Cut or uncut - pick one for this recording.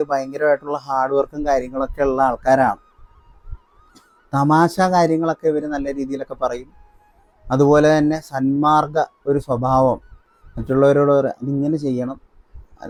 uncut